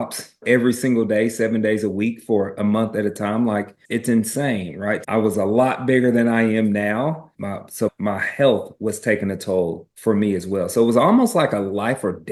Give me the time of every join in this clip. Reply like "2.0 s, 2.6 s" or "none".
none

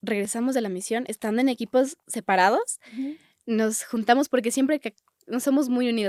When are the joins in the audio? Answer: none

